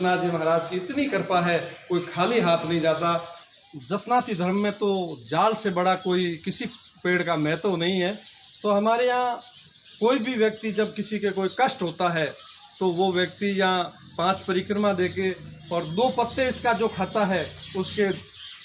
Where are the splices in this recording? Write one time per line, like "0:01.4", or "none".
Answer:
0:03.4